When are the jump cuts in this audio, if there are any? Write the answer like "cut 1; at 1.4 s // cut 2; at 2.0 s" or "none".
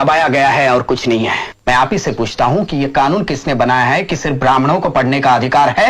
cut 1; at 1.5 s